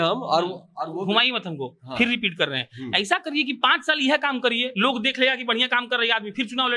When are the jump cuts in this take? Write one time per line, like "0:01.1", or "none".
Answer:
none